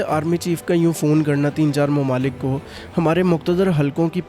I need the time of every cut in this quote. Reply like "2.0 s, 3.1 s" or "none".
none